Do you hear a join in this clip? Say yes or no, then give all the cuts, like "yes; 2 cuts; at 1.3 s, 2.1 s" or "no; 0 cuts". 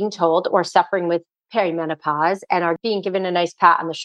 yes; 1 cut; at 2.8 s